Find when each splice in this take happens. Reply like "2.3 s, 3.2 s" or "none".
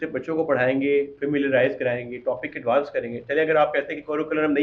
none